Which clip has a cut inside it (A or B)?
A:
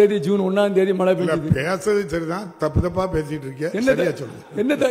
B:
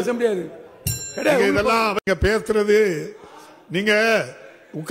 B